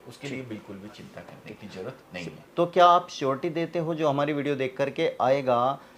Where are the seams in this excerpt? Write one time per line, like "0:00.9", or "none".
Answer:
0:02.3